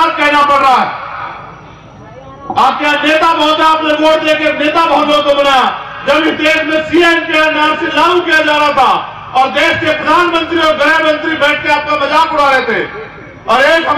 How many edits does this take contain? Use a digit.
0